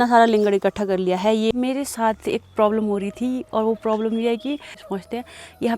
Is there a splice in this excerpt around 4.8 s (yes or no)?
yes